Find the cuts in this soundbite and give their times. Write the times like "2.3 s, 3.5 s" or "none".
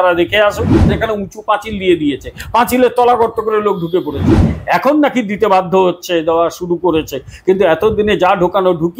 0.9 s, 4.5 s